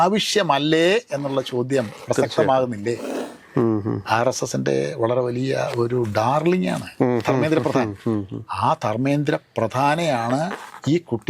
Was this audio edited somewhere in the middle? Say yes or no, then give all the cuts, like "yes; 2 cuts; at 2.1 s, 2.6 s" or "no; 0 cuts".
yes; 1 cut; at 3.1 s